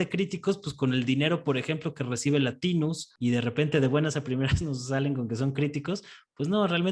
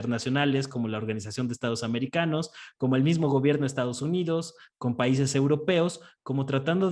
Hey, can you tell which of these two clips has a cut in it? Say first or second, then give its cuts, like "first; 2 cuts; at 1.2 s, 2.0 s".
first; 1 cut; at 3.1 s